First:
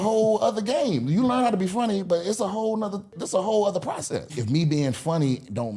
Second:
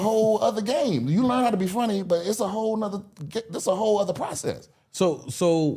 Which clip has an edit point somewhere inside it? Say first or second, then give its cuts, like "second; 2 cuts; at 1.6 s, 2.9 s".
first; 2 cuts; at 3.2 s, 4.4 s